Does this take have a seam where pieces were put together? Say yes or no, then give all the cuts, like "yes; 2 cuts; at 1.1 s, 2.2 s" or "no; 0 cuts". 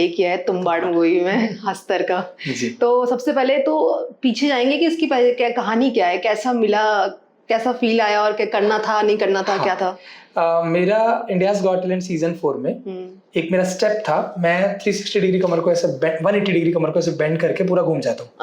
no; 0 cuts